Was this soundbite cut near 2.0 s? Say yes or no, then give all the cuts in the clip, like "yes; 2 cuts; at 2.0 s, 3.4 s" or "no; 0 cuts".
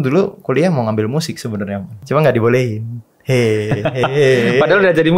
yes; 1 cut; at 2.0 s